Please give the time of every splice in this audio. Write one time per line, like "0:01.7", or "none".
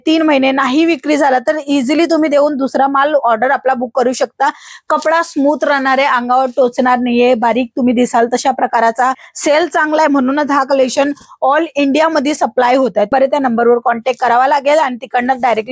0:04.7
0:09.3
0:13.1